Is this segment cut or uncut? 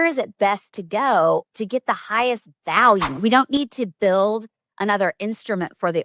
cut